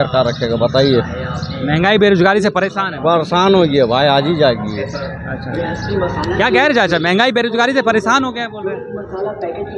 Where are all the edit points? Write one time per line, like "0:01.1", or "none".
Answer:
none